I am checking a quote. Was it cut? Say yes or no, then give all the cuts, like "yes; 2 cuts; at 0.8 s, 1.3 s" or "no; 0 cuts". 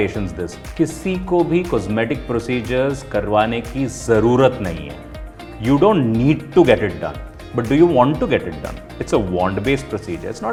no; 0 cuts